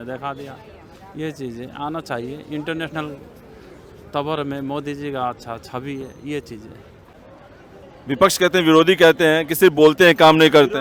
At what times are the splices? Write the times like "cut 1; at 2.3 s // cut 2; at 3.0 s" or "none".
none